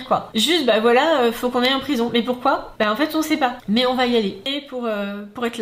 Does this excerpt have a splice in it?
yes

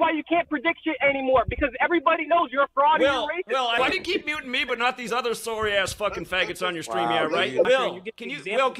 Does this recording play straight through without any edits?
no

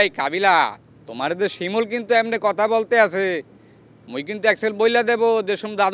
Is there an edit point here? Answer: no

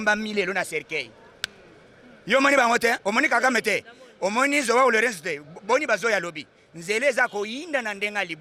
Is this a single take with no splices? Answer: yes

